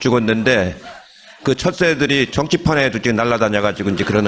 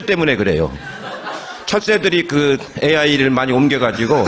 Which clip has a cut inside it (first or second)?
first